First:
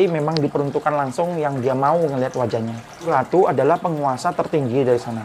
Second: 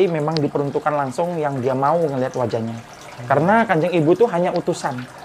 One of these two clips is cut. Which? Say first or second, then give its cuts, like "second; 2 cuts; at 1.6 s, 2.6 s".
first; 1 cut; at 3.1 s